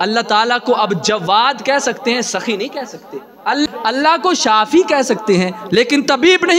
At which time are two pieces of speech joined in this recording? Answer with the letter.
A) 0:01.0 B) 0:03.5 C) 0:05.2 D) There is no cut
B